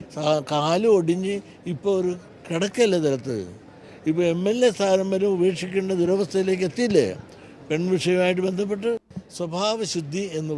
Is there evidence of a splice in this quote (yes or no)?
yes